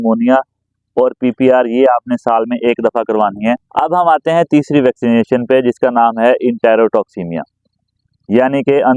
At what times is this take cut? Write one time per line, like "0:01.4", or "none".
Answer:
0:03.6